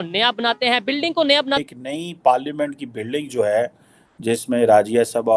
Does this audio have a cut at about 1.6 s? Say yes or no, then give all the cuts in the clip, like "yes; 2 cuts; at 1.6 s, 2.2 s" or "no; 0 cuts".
yes; 1 cut; at 1.6 s